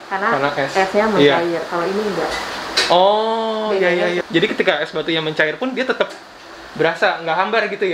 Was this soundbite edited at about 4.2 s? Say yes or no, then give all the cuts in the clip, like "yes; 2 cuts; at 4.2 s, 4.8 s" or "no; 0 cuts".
yes; 1 cut; at 4.2 s